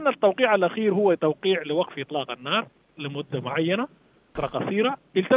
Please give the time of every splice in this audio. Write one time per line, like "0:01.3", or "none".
0:04.4